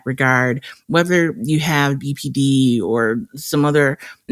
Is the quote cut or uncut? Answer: uncut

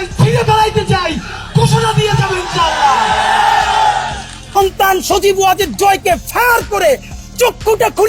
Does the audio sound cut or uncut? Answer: cut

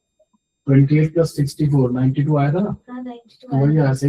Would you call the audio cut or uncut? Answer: uncut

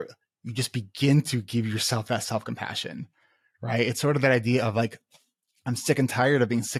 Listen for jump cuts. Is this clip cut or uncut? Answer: uncut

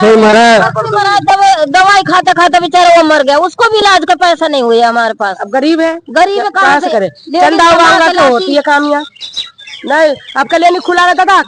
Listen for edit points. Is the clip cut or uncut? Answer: uncut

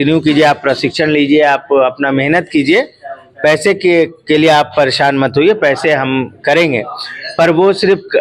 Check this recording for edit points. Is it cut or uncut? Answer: uncut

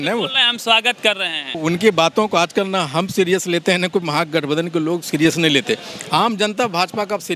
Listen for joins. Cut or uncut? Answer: cut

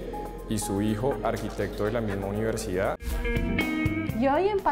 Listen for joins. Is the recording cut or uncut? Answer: cut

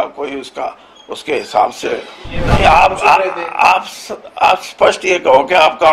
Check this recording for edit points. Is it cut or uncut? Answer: cut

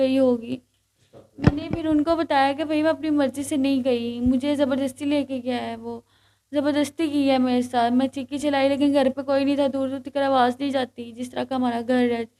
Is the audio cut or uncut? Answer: uncut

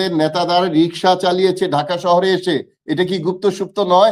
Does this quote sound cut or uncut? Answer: uncut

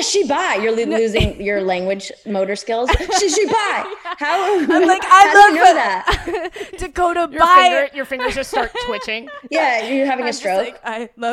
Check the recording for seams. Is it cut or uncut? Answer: uncut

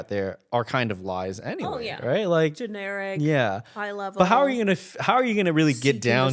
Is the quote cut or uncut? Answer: uncut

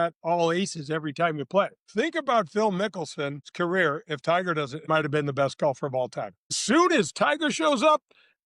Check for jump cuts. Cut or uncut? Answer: cut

